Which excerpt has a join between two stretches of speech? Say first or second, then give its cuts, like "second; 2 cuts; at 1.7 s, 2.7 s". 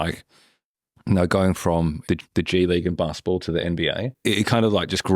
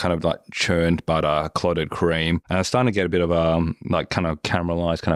first; 2 cuts; at 2.1 s, 4.1 s